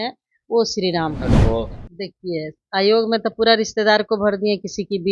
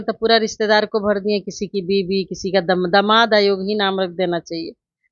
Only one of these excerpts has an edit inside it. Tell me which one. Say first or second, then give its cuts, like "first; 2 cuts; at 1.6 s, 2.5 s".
first; 1 cut; at 1.5 s